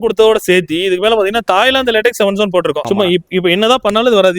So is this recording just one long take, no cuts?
no; 1 cut; at 2.8 s

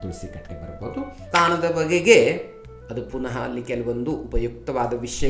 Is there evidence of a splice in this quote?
yes; 1 cut; at 1.2 s

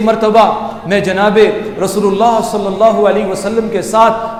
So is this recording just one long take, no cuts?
yes; 0 cuts

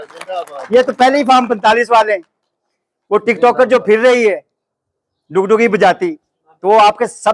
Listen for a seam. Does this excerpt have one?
no; 0 cuts

